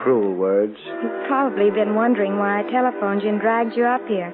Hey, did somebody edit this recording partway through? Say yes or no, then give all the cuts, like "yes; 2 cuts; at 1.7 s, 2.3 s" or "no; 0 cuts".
yes; 1 cut; at 1.2 s